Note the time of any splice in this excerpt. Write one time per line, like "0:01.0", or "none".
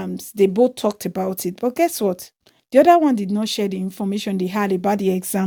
none